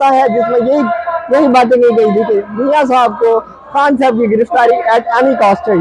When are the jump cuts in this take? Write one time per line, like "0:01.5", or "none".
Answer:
none